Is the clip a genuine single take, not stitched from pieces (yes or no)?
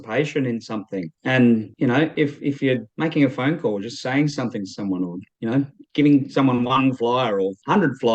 yes